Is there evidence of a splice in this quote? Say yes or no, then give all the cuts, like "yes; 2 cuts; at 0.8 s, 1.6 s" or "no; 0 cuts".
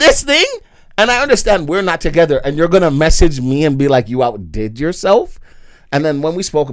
no; 0 cuts